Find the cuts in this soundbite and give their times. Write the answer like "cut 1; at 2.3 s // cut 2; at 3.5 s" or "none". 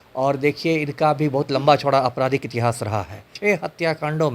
cut 1; at 3.3 s